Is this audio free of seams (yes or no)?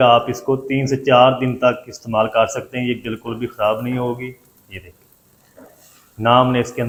yes